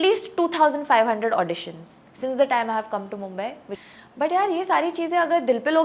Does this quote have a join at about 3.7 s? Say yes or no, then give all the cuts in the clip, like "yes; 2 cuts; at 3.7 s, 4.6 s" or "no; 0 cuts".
yes; 1 cut; at 3.7 s